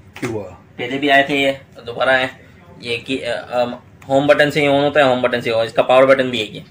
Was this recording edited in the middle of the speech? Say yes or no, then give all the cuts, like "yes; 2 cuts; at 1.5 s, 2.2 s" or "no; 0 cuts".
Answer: no; 0 cuts